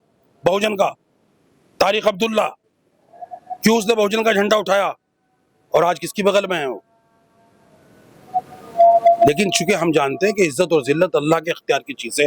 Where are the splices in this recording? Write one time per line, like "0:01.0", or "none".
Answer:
none

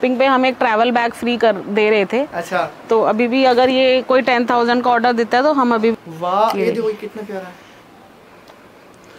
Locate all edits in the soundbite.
0:05.9

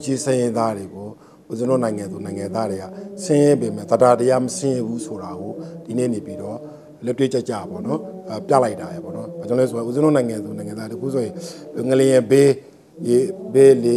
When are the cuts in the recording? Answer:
none

